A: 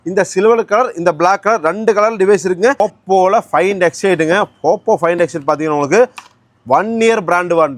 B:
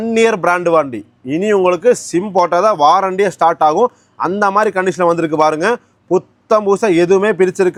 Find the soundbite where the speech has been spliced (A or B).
A